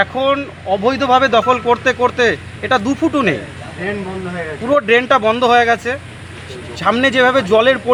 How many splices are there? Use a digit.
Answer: 0